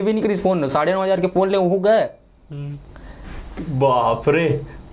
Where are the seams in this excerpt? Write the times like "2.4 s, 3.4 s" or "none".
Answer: 3.2 s